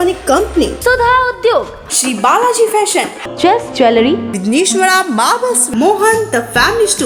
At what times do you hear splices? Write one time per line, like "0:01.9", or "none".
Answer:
none